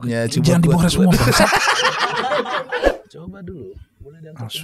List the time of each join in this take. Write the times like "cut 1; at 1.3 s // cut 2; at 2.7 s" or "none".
cut 1; at 3.0 s